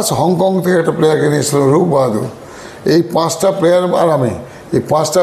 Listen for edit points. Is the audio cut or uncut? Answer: uncut